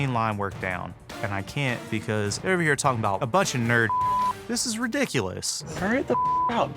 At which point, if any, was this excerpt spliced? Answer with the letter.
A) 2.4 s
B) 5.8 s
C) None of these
B